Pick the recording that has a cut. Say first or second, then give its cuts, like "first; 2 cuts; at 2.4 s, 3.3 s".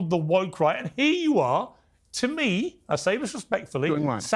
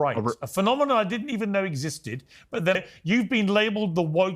second; 1 cut; at 2.8 s